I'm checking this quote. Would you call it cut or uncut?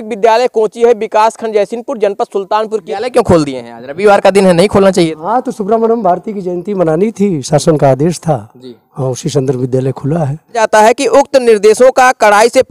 cut